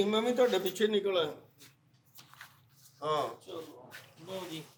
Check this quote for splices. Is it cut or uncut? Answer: uncut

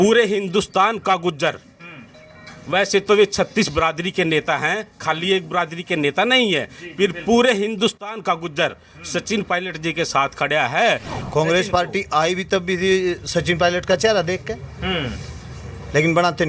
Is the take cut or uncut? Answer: cut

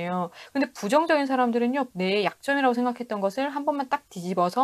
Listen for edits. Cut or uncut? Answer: cut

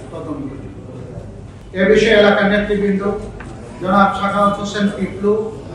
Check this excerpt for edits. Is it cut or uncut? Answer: uncut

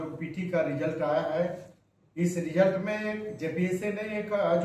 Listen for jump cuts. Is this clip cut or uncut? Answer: uncut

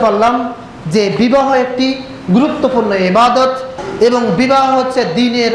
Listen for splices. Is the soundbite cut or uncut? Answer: cut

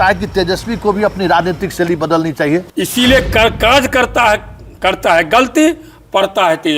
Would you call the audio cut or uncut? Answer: cut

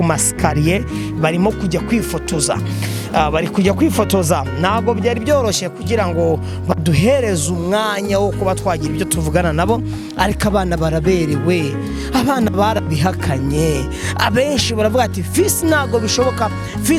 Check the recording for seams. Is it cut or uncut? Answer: uncut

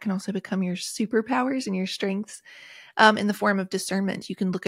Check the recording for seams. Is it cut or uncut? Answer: uncut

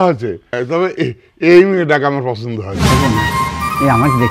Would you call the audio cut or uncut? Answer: cut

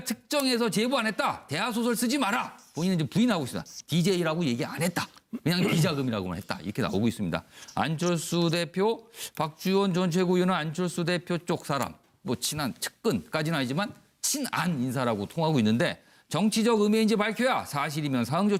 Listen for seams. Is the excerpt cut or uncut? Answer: uncut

